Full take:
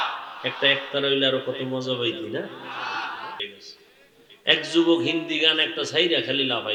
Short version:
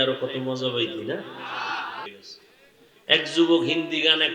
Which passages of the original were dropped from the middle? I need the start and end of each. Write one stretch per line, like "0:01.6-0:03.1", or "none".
0:03.3-0:03.4